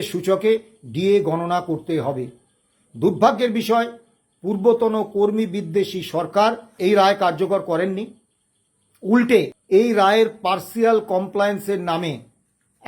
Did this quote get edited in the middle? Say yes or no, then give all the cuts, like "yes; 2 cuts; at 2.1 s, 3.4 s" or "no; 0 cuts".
yes; 2 cuts; at 6.7 s, 9.6 s